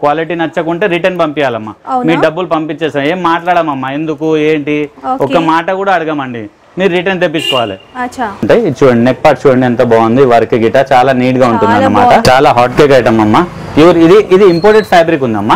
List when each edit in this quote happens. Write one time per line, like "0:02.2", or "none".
0:08.5
0:12.2